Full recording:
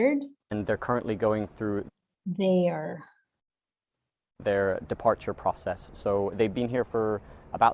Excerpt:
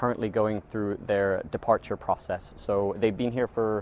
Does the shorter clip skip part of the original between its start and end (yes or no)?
yes